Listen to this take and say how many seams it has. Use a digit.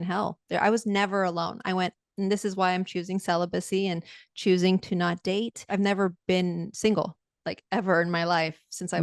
1